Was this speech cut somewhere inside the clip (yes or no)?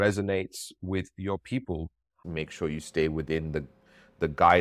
yes